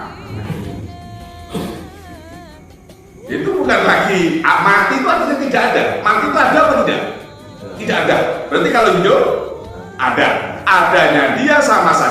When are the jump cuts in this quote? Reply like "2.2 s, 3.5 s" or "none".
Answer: 3.1 s